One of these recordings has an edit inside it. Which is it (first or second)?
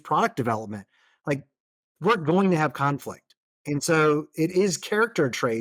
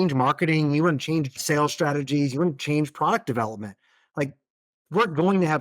second